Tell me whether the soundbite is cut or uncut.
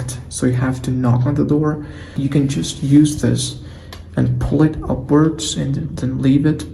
cut